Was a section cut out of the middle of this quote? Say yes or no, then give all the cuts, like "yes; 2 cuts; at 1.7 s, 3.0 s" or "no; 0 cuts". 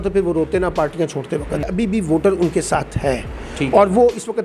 yes; 1 cut; at 1.7 s